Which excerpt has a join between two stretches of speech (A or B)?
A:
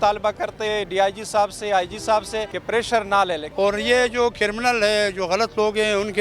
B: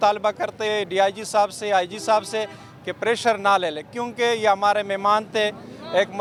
A